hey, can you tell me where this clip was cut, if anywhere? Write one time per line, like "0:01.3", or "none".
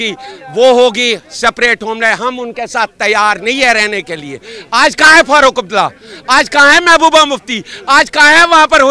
none